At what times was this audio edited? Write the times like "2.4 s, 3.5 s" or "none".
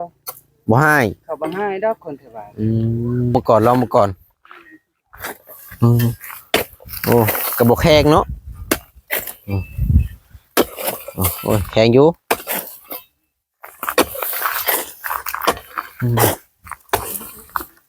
3.3 s